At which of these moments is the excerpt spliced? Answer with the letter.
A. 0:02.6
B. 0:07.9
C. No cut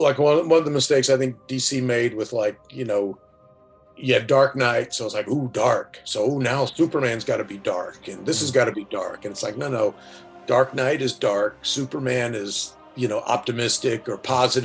C